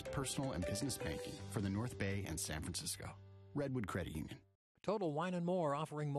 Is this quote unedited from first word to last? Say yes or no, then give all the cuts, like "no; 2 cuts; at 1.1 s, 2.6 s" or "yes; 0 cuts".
no; 1 cut; at 4.5 s